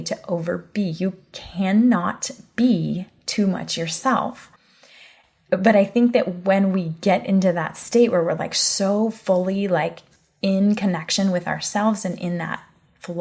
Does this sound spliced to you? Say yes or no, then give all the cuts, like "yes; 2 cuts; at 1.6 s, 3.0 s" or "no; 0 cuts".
no; 0 cuts